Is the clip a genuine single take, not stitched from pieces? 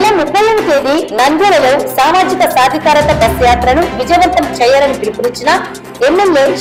yes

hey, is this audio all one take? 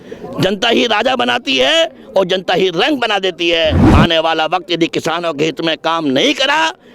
no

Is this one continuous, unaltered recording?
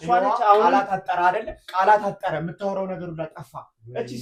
yes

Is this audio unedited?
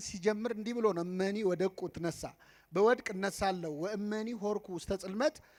yes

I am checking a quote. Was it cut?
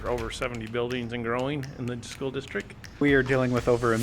yes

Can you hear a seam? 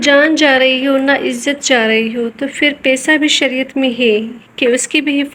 no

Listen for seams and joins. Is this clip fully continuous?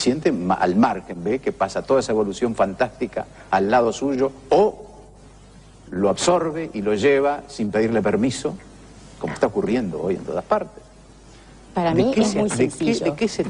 no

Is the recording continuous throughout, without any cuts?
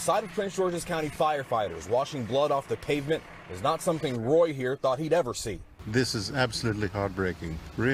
yes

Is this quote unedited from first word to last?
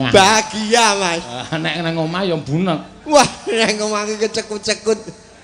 yes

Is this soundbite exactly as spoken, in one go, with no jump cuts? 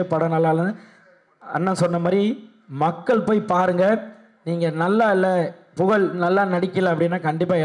yes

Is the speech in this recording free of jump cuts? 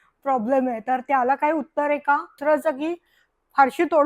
no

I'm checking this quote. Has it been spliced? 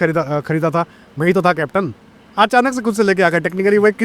no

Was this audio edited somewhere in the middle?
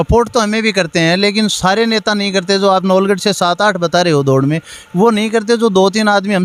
no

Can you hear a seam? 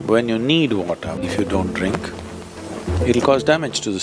yes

